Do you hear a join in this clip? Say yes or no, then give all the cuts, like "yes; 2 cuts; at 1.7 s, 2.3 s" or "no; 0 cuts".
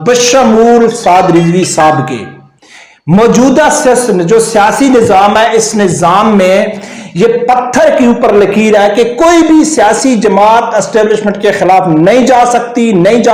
no; 0 cuts